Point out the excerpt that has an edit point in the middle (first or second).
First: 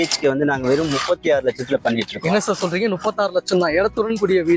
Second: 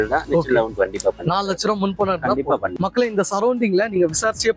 second